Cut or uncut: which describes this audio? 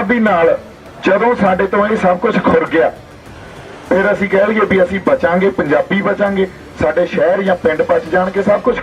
uncut